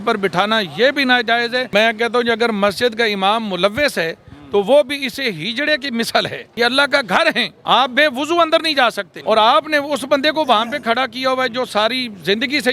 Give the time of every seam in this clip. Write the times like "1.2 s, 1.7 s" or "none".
1.7 s, 6.4 s, 7.5 s, 9.1 s